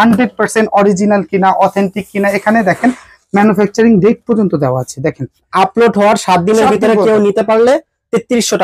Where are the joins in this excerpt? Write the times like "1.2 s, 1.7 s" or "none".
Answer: 5.5 s